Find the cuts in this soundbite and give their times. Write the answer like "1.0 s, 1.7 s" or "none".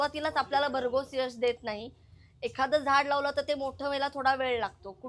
none